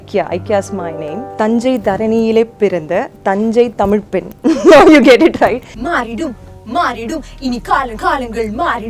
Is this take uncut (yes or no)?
no